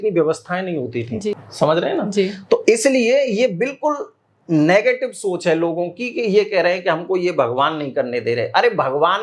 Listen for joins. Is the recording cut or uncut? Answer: cut